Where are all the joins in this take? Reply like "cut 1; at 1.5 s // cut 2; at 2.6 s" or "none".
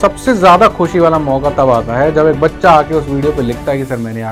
none

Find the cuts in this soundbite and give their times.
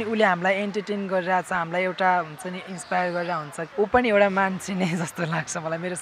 cut 1; at 3.6 s

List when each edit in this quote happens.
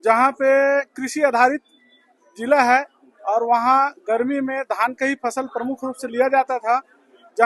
none

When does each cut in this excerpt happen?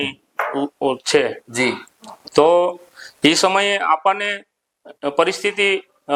none

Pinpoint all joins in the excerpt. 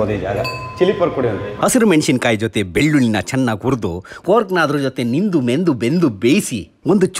cut 1; at 1.5 s

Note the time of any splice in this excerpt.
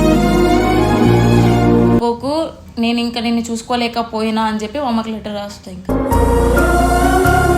cut 1; at 2.0 s

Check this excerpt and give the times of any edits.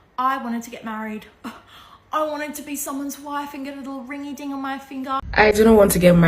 cut 1; at 5.2 s

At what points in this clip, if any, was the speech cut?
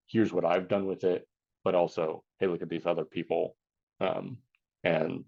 none

